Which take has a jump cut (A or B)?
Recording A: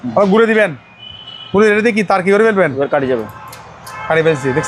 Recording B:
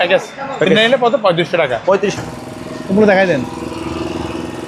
B